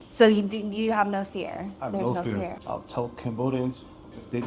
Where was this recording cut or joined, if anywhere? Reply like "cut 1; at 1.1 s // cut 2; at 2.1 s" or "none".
cut 1; at 2.6 s